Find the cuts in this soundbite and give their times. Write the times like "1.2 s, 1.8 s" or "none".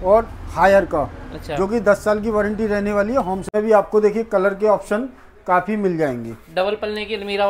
3.4 s